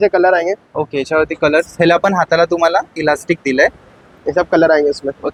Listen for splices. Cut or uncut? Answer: uncut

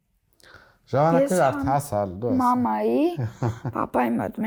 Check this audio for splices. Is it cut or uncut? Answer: uncut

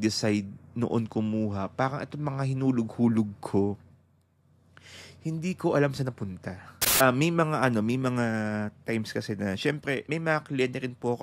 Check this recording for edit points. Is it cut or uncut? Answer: cut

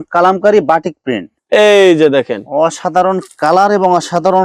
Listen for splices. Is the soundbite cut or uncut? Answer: cut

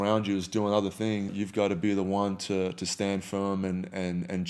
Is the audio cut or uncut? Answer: cut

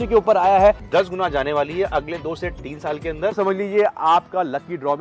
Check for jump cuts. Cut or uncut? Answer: cut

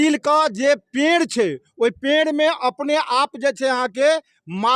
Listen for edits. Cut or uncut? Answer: uncut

